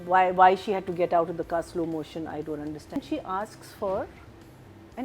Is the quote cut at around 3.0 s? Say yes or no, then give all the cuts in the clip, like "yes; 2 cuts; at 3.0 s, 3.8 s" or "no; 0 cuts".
yes; 1 cut; at 3.0 s